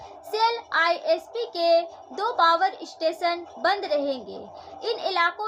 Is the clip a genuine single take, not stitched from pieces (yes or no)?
yes